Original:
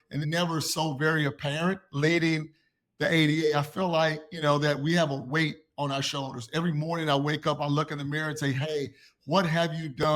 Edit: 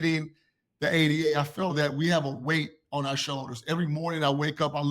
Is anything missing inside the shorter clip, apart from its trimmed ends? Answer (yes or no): yes